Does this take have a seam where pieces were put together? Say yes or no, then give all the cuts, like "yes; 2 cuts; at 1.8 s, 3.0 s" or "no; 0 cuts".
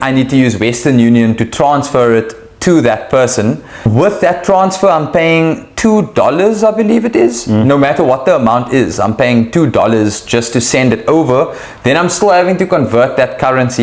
yes; 1 cut; at 3.9 s